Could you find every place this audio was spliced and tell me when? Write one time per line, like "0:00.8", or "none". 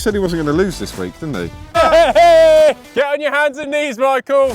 0:02.8